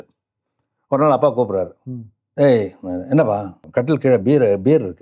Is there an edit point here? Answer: yes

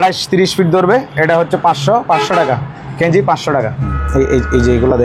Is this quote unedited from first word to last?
no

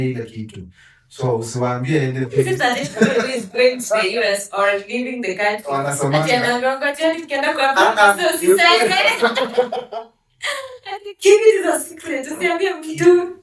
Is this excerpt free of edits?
yes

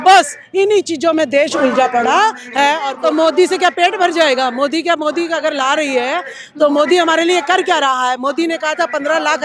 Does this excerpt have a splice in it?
yes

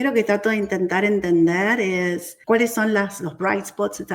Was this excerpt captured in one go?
no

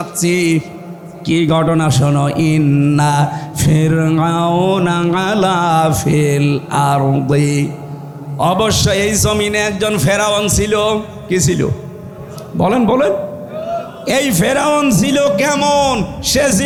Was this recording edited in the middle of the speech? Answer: no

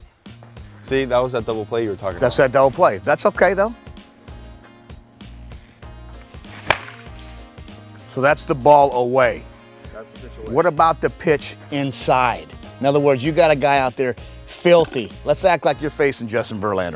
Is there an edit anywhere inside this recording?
yes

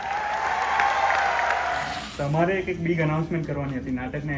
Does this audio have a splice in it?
yes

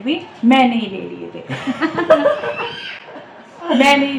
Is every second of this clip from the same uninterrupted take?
yes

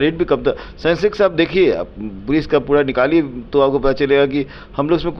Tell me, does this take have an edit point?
no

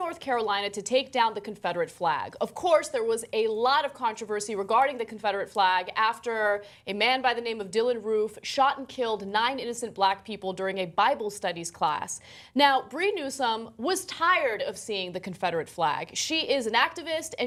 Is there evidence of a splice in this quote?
no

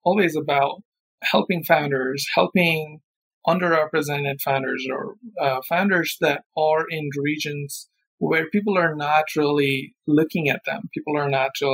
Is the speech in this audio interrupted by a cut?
yes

